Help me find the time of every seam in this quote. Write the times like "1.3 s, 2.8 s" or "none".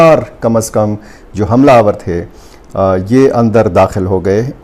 none